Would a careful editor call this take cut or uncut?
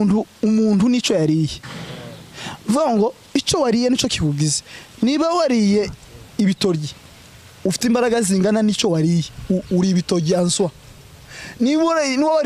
uncut